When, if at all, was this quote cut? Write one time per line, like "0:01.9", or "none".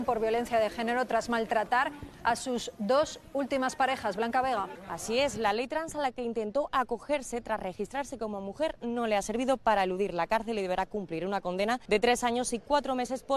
none